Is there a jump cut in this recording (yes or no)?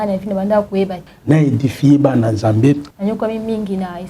yes